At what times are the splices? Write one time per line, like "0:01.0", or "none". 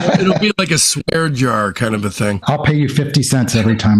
0:02.4